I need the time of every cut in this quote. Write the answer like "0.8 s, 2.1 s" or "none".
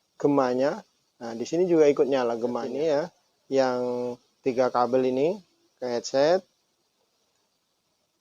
2.7 s